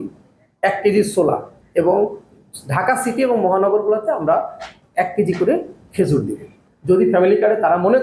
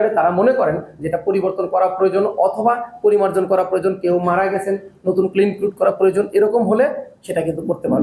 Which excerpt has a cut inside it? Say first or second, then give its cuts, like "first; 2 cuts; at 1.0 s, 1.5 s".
first; 1 cut; at 6.6 s